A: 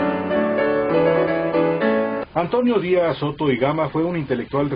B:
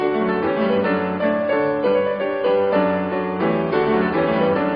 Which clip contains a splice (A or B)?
A